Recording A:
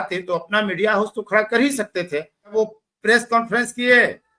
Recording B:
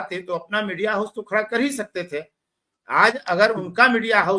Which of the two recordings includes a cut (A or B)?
A